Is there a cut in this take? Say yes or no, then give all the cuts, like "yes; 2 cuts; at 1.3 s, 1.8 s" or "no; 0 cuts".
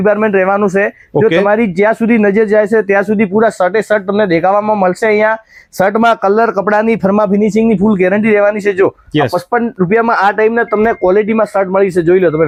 no; 0 cuts